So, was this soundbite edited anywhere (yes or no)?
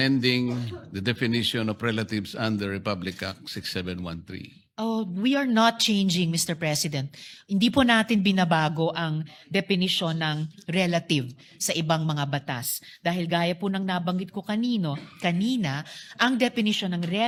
no